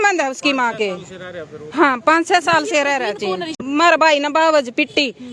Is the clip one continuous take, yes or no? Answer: no